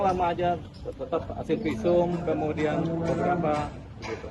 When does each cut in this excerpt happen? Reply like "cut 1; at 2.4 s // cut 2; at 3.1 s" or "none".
none